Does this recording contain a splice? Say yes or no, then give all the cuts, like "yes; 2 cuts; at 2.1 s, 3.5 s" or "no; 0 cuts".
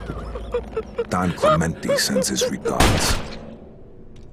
no; 0 cuts